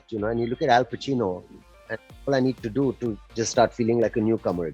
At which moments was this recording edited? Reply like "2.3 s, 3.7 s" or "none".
none